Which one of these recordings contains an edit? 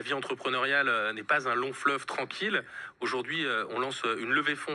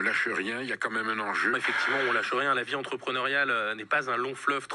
second; 1 cut; at 1.5 s

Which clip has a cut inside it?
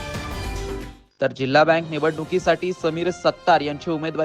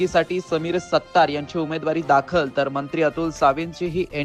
first; 1 cut; at 0.9 s

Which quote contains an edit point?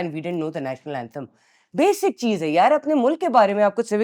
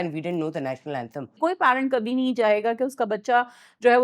second; 1 cut; at 1.3 s

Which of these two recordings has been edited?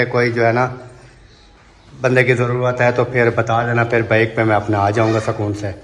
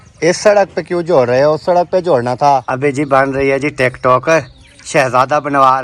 second; 1 cut; at 2.7 s

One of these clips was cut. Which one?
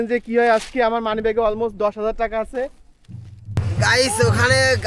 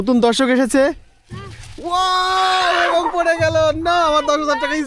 first; 1 cut; at 3.6 s

